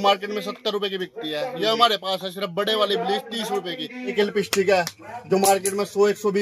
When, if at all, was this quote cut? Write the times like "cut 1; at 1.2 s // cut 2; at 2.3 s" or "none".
cut 1; at 4.1 s